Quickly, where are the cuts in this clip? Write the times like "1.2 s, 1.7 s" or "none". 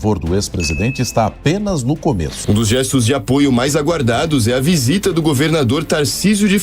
2.3 s